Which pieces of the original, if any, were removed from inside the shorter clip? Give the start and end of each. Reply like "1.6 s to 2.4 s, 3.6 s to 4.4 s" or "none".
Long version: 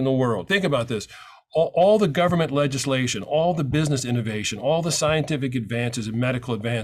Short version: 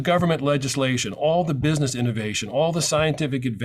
none